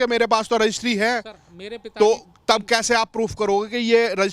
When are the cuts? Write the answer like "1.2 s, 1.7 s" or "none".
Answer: none

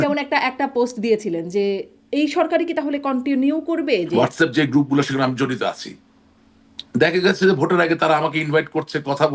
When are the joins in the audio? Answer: 4.1 s

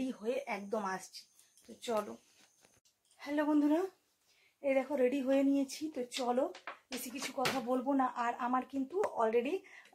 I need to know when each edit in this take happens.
none

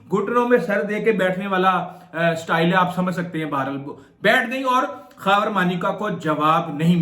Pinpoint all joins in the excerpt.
none

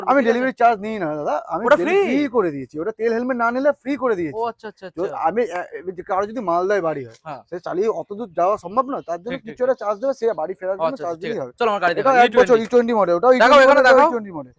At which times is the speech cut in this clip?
none

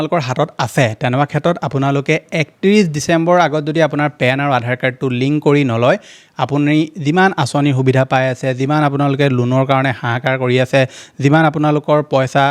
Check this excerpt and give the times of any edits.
none

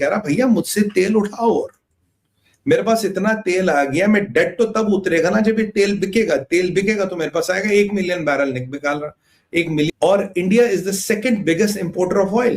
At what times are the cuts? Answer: 9.9 s

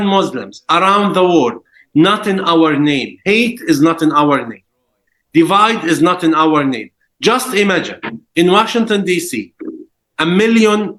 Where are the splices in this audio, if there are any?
none

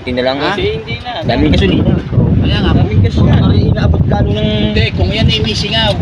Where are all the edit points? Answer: none

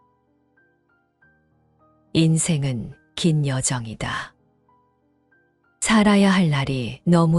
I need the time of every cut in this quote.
2.1 s

